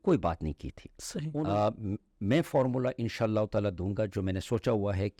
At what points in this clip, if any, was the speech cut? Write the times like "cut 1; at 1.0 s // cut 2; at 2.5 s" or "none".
cut 1; at 1.3 s